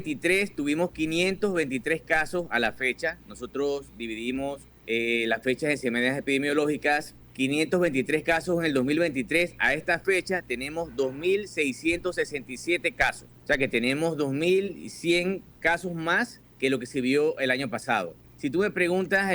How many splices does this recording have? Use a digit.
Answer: 5